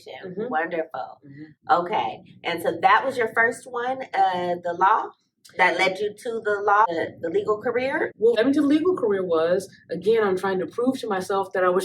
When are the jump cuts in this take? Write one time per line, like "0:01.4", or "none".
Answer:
0:06.9
0:08.3